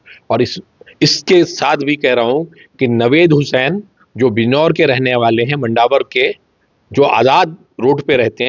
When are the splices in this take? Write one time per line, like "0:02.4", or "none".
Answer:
none